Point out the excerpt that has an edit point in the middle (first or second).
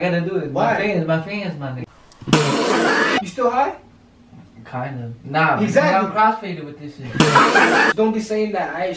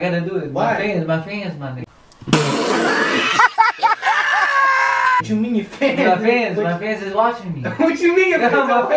first